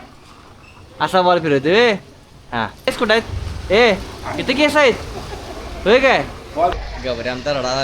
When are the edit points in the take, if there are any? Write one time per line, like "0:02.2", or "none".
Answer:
0:02.9
0:06.7